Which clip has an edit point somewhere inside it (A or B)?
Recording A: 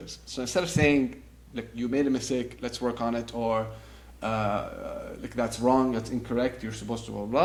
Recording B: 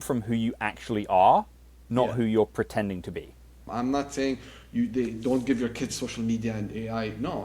B